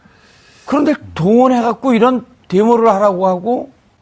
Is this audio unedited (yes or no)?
no